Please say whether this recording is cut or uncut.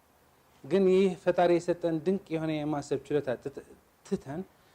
uncut